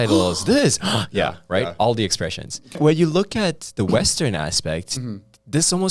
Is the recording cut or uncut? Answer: cut